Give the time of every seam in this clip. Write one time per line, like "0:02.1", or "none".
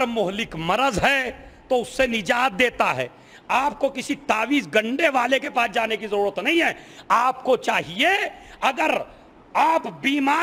none